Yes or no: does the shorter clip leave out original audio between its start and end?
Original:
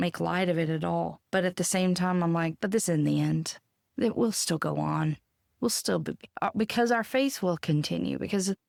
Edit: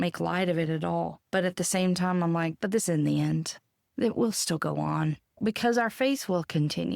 yes